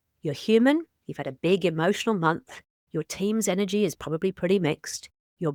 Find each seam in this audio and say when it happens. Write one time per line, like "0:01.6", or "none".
none